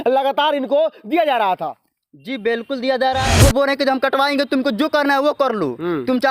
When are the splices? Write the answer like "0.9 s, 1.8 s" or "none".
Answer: 3.3 s